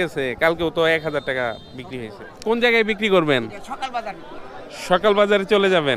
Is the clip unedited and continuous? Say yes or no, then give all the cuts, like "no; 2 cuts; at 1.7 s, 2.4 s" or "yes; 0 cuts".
no; 1 cut; at 2.2 s